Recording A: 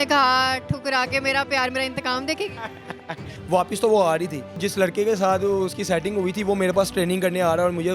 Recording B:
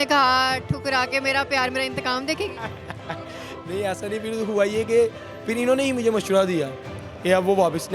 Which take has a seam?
A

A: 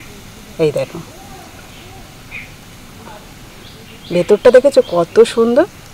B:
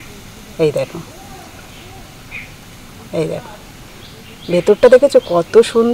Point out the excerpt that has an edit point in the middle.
A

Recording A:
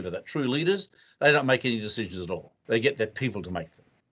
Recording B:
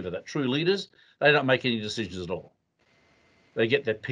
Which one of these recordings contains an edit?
A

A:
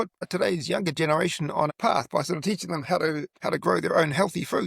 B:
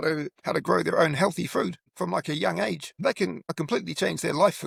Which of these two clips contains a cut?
A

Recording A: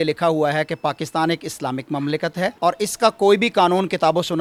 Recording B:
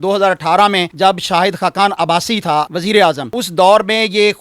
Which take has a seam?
B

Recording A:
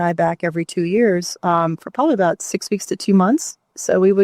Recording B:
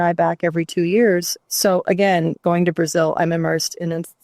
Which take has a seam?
B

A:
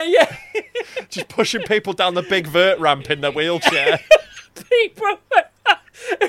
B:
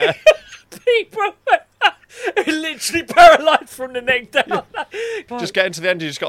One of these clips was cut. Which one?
B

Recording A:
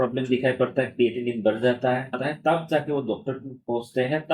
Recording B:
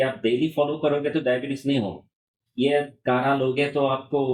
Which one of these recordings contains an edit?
A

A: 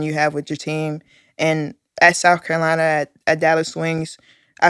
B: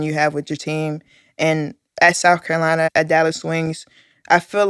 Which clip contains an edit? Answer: B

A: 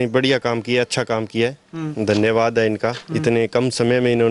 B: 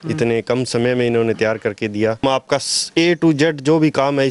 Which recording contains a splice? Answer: B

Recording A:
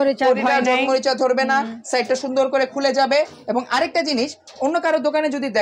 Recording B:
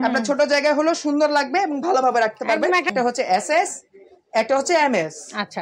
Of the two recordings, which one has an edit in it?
B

